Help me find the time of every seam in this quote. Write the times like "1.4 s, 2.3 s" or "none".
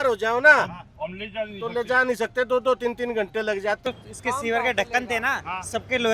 3.8 s

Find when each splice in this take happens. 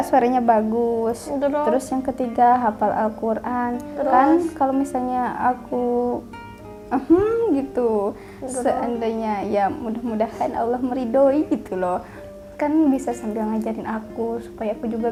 none

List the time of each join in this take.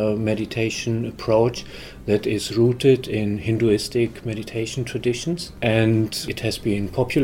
5.5 s, 6.3 s

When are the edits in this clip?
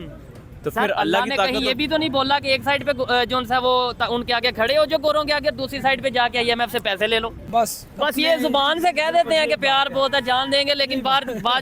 7.5 s

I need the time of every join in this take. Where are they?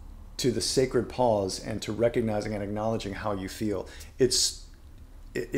none

